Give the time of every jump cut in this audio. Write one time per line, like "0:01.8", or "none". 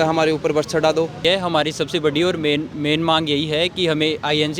0:01.2